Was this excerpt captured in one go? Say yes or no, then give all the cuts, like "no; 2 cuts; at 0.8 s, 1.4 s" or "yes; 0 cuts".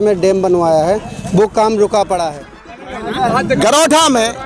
no; 1 cut; at 2.7 s